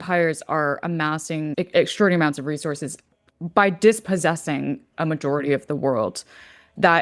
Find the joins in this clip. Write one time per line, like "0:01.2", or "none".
0:01.5